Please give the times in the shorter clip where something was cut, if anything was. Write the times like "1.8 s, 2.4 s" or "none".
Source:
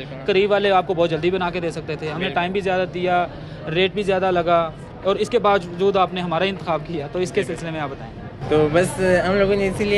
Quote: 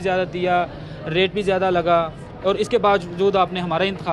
none

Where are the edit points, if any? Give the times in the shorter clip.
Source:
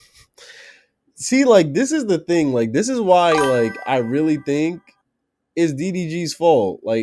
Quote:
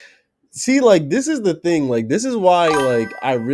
none

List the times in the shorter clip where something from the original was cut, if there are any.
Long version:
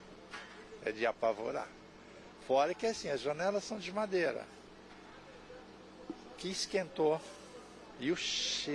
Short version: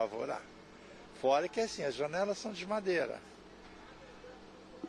none

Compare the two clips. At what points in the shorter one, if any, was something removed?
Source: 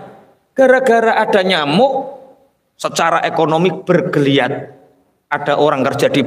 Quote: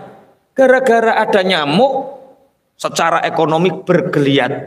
none

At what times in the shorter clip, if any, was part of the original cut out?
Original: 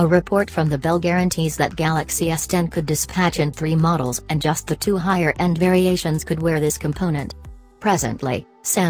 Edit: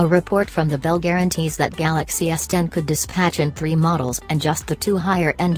none

